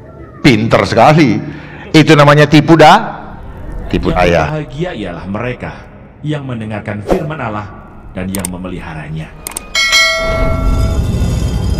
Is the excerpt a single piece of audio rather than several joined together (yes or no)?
no